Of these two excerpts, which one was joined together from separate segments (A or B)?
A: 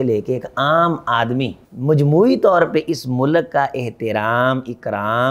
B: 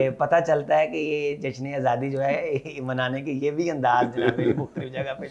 A